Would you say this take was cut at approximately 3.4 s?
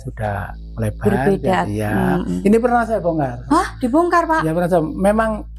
yes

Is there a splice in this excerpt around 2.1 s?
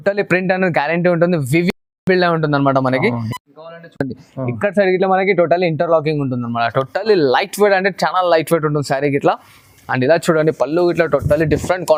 no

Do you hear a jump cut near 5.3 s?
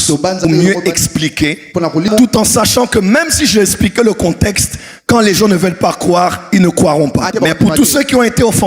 no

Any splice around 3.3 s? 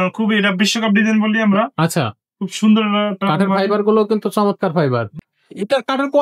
no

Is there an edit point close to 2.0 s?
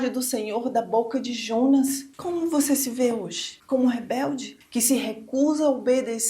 yes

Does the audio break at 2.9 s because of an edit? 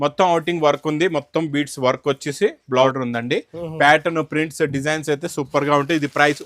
yes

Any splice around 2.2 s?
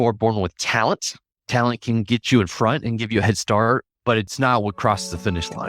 yes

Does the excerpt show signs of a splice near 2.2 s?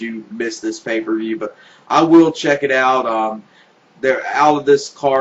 yes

